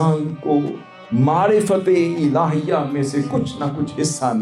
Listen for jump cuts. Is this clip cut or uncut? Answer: uncut